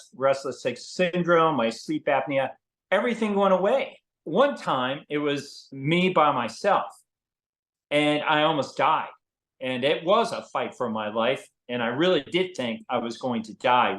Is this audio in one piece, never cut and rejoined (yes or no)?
no